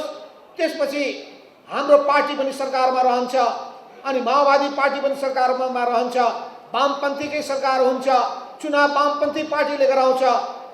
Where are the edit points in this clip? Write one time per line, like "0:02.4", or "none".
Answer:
none